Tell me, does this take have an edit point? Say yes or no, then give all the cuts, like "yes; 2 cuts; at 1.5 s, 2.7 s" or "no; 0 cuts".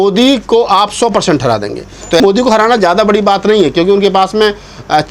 yes; 1 cut; at 2.2 s